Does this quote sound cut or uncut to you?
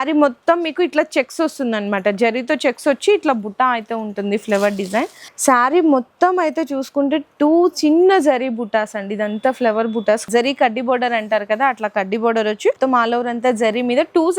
cut